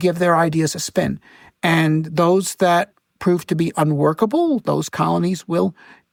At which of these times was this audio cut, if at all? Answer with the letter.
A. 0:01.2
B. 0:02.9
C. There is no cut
C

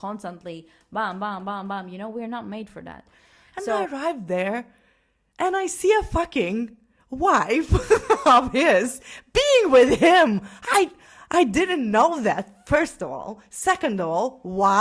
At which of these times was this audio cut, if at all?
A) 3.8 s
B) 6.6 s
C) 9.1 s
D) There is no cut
A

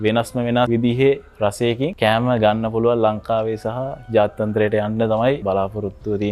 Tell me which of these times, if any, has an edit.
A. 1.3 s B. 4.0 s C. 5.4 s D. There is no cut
C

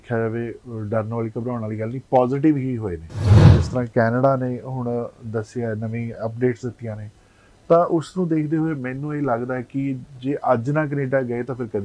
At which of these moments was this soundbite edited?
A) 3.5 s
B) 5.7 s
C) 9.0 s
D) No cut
A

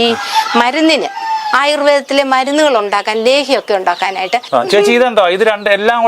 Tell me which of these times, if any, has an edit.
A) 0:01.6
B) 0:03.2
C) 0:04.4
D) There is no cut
C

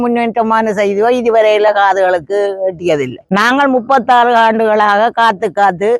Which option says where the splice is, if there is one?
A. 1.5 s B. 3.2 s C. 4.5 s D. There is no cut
B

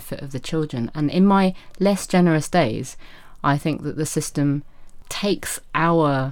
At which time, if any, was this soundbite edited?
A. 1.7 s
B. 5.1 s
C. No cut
B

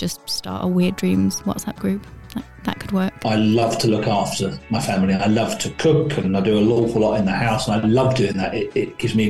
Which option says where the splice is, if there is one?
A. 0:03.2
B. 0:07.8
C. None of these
A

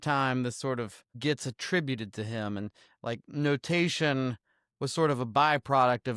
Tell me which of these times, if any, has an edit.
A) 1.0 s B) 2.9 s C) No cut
A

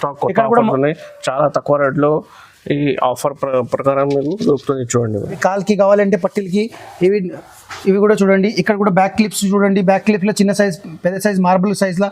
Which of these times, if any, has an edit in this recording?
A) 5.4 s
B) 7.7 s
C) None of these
A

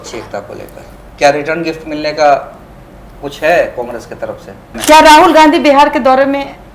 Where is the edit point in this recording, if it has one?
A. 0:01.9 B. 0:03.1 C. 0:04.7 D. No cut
C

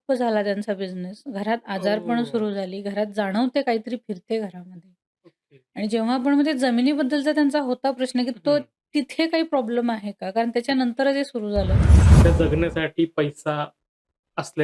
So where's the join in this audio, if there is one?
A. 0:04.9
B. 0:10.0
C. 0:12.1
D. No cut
C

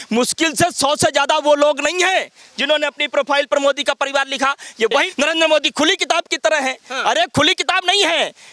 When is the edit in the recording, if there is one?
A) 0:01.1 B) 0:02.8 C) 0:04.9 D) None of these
C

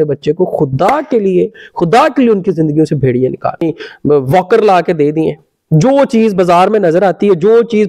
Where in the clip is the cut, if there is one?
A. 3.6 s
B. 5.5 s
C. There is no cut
A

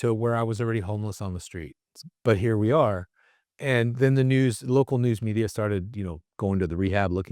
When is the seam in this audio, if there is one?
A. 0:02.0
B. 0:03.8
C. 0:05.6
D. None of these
A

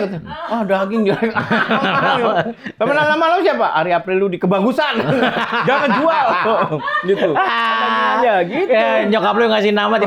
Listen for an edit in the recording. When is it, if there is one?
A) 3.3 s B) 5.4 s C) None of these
C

